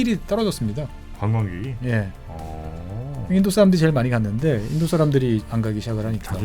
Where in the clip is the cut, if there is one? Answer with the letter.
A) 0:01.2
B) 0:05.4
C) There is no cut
B